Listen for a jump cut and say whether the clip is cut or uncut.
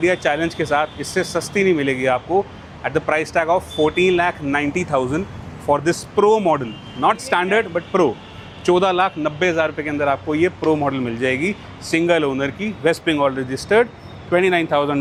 uncut